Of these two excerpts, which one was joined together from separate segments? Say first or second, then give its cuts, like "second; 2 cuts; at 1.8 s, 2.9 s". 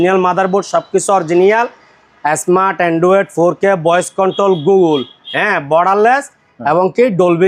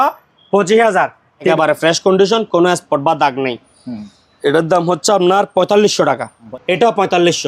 second; 2 cuts; at 1.5 s, 6.4 s